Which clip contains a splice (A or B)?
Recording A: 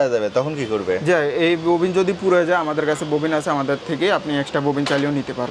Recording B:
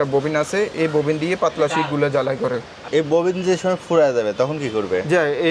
B